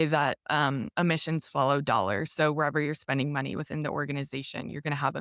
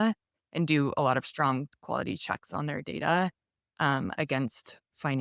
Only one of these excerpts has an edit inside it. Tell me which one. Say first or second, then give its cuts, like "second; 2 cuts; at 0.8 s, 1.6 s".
second; 1 cut; at 1.7 s